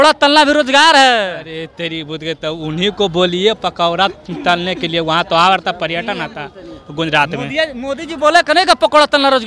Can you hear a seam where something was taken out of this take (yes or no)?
no